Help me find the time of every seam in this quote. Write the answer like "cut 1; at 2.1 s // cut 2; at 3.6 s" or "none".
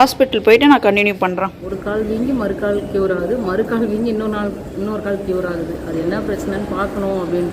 cut 1; at 1.7 s